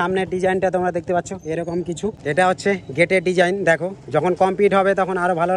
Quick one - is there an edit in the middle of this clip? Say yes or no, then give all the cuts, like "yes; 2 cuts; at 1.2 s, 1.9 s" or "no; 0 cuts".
no; 0 cuts